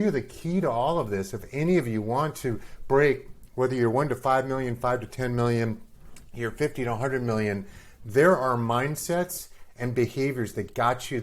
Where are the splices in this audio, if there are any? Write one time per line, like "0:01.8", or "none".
none